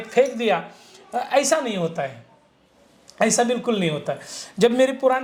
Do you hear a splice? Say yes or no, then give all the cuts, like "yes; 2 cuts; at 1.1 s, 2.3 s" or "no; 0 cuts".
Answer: no; 0 cuts